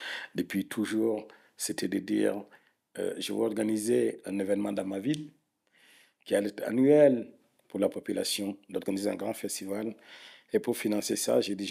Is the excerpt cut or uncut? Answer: uncut